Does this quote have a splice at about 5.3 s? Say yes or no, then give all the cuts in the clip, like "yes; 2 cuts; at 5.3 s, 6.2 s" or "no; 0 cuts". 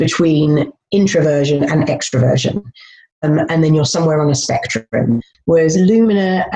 yes; 1 cut; at 5.3 s